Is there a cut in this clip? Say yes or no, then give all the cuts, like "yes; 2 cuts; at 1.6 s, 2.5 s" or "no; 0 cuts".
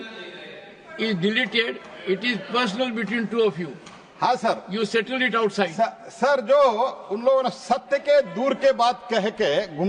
no; 0 cuts